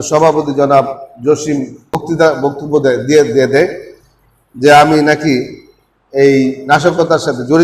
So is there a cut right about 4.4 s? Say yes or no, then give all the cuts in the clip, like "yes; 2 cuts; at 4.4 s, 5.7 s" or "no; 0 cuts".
no; 1 cut; at 2.0 s